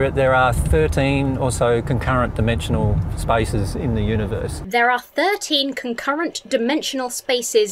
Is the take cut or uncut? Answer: uncut